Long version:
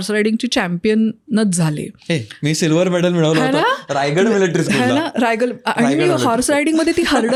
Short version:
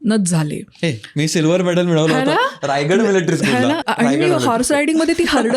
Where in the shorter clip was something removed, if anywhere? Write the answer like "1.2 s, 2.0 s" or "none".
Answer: 3.8 s